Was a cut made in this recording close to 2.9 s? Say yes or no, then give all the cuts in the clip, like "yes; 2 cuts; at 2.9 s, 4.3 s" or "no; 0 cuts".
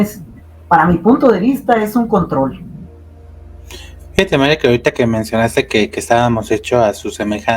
no; 0 cuts